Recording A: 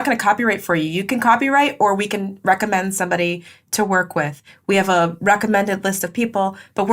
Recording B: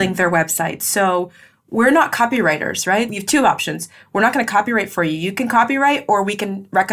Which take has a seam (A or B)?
B